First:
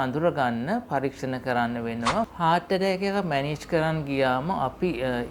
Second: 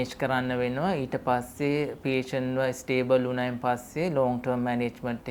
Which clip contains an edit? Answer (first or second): first